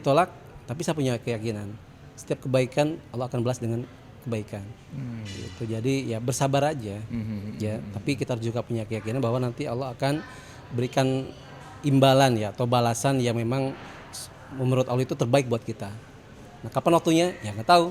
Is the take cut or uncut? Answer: uncut